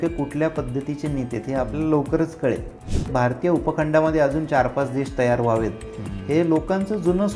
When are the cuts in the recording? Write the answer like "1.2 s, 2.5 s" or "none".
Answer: 3.1 s